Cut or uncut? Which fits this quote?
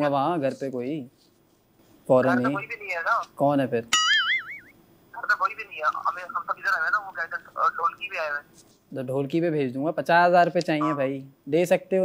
uncut